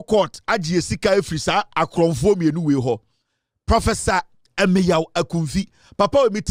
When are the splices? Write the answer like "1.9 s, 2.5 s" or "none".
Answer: none